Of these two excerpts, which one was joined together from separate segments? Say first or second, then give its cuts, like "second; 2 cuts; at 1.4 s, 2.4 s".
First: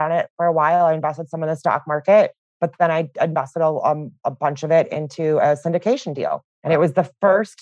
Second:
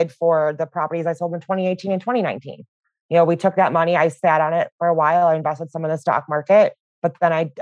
first; 2 cuts; at 4.2 s, 6.5 s